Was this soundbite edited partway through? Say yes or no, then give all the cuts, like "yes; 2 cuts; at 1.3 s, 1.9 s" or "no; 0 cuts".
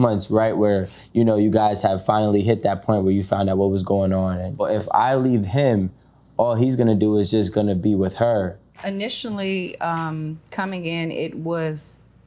yes; 2 cuts; at 4.6 s, 8.7 s